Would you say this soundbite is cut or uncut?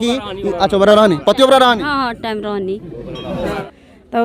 uncut